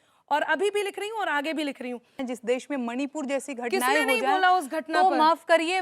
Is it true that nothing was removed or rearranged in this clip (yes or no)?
no